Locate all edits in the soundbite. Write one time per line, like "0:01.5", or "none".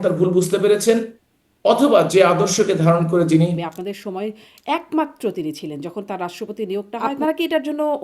0:03.6
0:07.1

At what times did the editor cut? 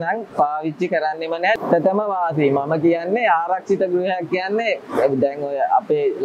0:01.5

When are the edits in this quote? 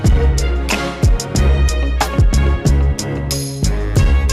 none

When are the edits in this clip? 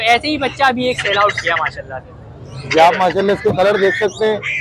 none

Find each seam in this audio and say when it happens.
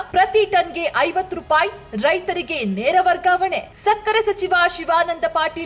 none

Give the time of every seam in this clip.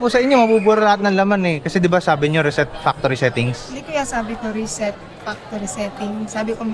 none

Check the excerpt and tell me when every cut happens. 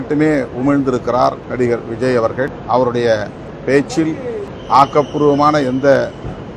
0:01.4
0:02.6
0:03.5
0:04.5

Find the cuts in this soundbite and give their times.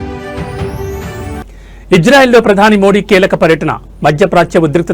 0:01.4

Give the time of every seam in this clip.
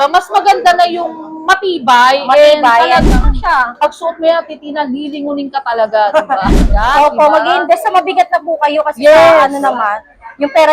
0:03.3
0:06.7

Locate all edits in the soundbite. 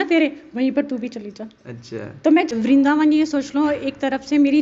0:02.5

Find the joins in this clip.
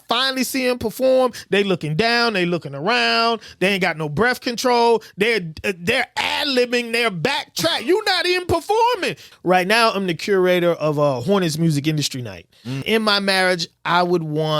0:09.3
0:12.8

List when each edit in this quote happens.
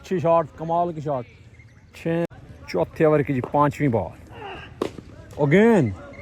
0:02.3

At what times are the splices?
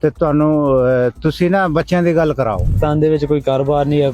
0:02.7

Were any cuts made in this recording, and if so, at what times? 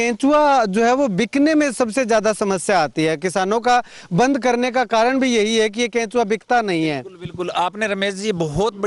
none

